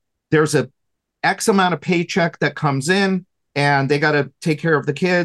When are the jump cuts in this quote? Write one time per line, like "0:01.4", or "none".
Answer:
0:03.4